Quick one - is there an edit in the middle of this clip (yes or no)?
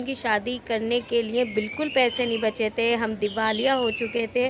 no